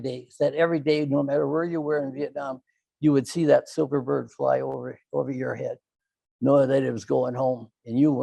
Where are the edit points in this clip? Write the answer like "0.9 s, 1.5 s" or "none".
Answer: none